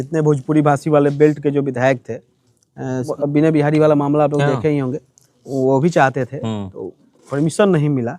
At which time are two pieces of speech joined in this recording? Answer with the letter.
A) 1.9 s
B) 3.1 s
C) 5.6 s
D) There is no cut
B